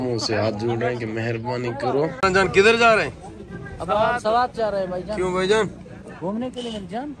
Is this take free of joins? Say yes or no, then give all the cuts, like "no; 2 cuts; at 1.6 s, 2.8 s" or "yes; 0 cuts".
no; 1 cut; at 2.2 s